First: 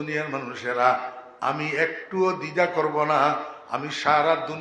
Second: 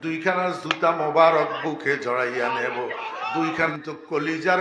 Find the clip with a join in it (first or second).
second